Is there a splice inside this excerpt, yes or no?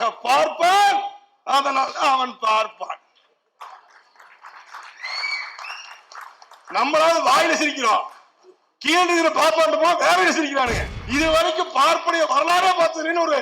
yes